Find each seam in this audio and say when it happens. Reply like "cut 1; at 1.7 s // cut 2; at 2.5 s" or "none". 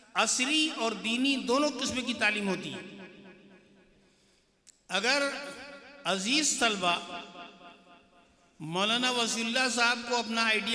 none